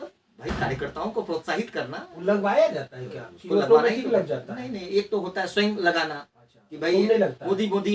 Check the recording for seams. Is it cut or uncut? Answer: uncut